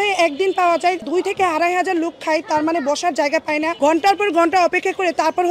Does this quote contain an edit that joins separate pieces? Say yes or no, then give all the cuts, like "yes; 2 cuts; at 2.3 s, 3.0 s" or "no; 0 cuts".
no; 0 cuts